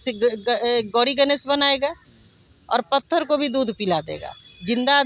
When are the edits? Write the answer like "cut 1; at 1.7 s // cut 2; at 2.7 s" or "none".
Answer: none